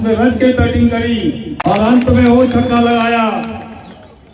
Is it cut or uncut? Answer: cut